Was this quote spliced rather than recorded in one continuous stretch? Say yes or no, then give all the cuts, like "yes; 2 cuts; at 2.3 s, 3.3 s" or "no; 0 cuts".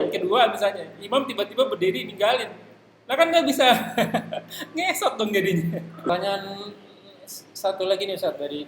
yes; 1 cut; at 5.9 s